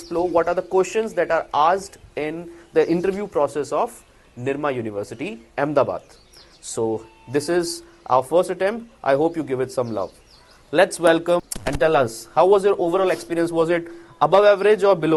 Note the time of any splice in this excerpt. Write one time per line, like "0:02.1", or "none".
none